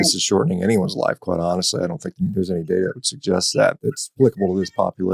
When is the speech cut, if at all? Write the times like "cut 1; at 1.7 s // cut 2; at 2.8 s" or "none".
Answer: cut 1; at 2.1 s // cut 2; at 4.1 s